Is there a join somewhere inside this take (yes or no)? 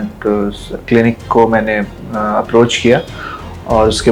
no